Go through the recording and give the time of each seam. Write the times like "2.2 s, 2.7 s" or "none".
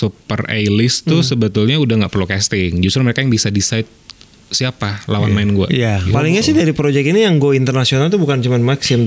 6.1 s